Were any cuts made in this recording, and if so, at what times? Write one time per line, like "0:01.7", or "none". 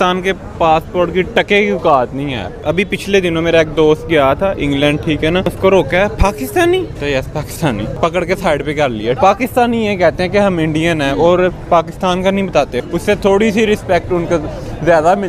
0:02.6
0:05.5
0:06.9
0:07.9
0:09.2
0:12.8